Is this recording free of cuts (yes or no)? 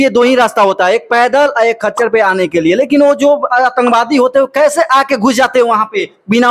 yes